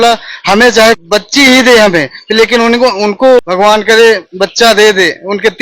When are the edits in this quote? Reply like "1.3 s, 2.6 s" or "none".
1.0 s, 3.5 s